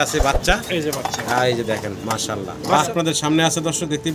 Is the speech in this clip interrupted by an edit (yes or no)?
yes